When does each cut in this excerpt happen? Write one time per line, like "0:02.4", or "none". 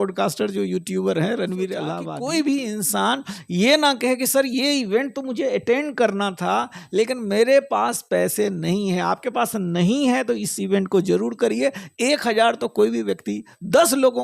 0:02.0

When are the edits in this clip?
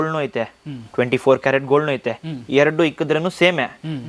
none

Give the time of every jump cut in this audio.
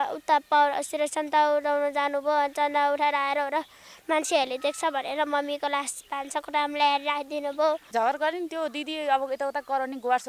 0:07.9

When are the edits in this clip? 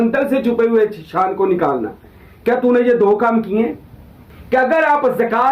0:04.6

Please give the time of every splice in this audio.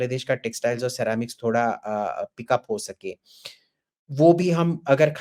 none

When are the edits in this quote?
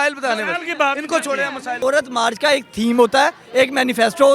0:01.8

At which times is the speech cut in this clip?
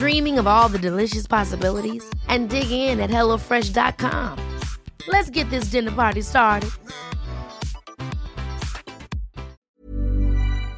0:09.6

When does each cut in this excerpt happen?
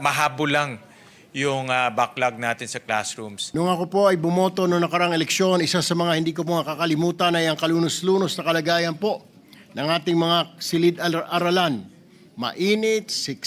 0:03.4

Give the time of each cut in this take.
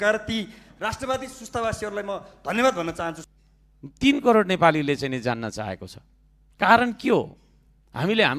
0:03.2

